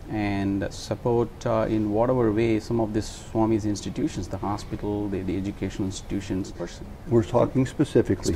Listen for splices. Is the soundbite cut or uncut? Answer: cut